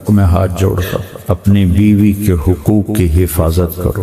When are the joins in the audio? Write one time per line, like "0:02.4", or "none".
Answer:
0:01.1